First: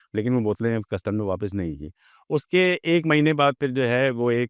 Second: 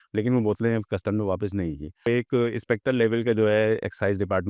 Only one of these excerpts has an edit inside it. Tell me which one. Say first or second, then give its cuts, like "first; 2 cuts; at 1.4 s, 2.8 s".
second; 1 cut; at 2.1 s